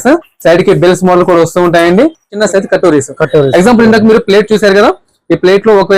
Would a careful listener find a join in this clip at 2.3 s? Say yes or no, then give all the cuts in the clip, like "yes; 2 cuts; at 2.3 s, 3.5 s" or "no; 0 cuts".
yes; 1 cut; at 2.3 s